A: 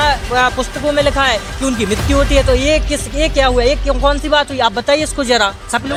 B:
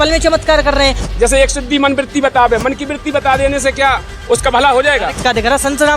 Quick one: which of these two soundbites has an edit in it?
B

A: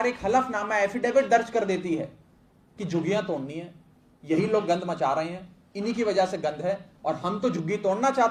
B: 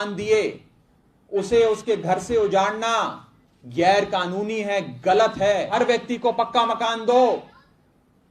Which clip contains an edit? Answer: B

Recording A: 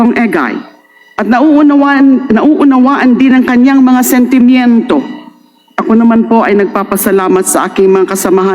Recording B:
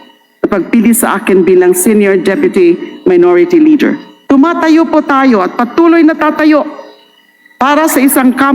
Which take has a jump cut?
B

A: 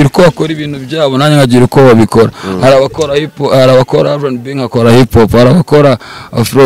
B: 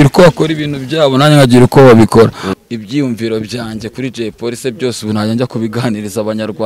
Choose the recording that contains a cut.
B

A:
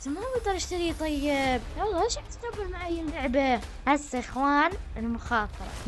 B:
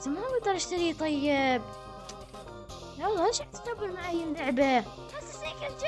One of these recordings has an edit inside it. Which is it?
A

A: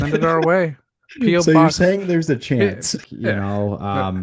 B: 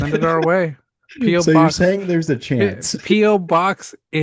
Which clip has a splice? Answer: A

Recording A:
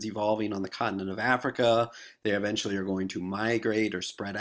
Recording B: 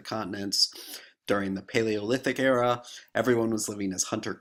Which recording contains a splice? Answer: A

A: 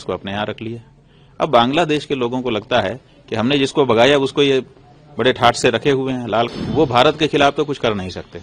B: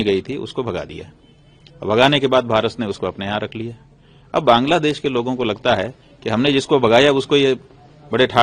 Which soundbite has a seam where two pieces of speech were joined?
A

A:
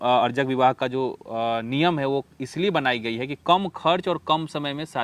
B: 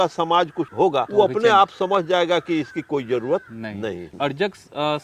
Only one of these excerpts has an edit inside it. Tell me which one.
B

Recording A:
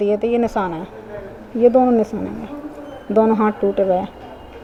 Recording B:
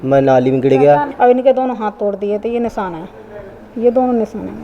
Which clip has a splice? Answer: B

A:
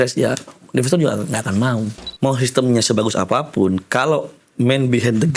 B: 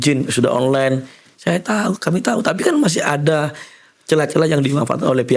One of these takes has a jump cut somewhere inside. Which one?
A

